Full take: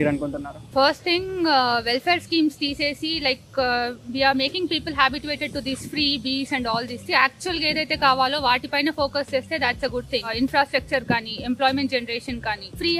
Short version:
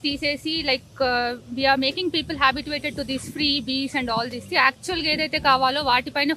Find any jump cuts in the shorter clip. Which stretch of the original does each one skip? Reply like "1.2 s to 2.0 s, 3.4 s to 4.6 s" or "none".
none